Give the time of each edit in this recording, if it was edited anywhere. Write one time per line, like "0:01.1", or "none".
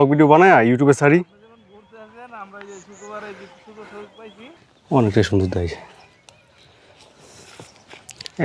0:04.6